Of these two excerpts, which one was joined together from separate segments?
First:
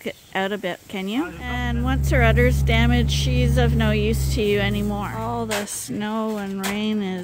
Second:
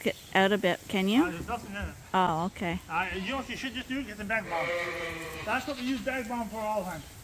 first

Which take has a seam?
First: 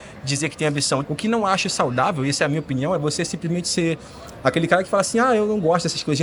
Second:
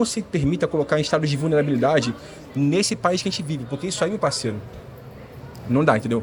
first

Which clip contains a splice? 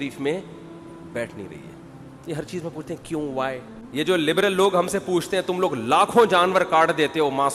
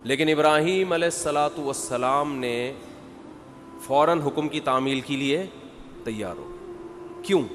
first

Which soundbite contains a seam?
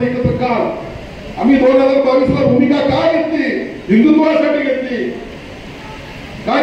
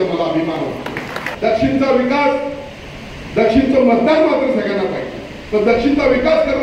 second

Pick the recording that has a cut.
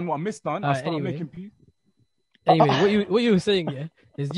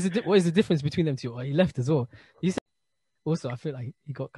second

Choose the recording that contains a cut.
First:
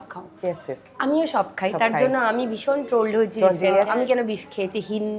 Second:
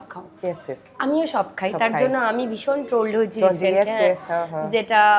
first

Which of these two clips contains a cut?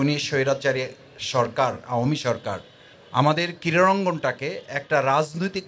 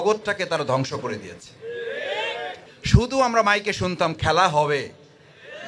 second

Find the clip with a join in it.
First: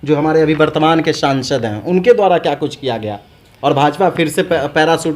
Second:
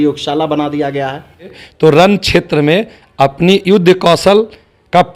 second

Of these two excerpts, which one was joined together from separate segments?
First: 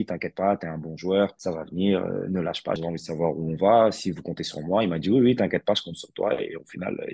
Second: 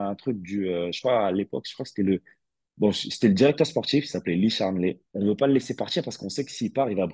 first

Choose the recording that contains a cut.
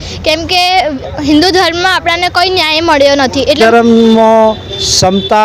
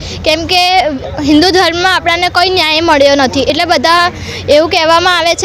first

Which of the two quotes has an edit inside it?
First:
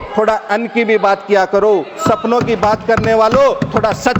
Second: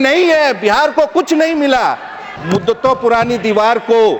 second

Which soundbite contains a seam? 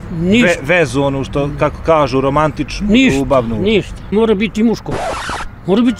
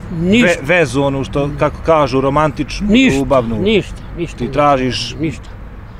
first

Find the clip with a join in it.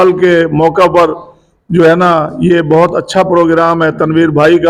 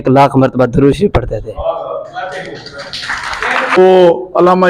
second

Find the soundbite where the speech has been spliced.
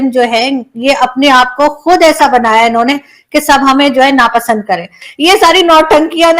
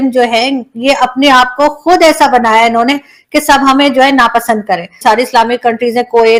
first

